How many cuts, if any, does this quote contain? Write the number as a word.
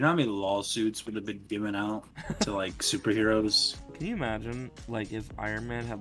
zero